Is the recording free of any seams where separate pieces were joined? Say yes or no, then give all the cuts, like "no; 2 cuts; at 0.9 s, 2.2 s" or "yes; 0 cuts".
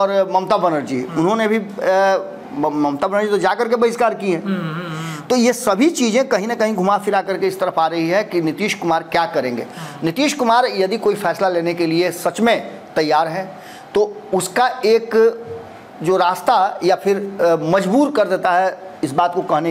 yes; 0 cuts